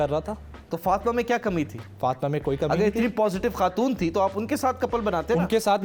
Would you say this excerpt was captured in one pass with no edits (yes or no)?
yes